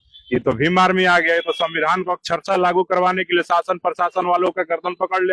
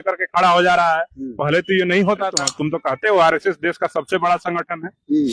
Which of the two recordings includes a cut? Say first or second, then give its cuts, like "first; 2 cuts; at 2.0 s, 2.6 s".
second; 1 cut; at 2.5 s